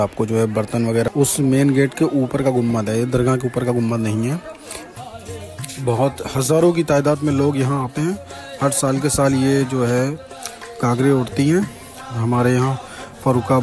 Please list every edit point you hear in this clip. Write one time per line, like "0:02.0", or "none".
0:01.1
0:04.9